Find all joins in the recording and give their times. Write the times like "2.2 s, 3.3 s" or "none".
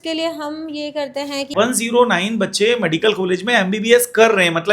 1.5 s